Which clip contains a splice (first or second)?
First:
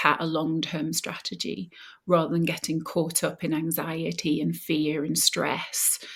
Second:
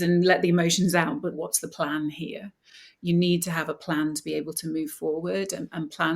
second